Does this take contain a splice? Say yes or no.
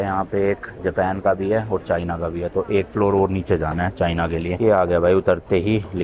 no